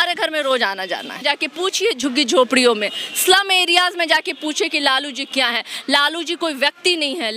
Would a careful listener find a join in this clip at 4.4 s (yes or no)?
no